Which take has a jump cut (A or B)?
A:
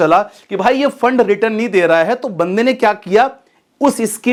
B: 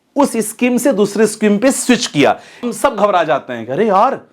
B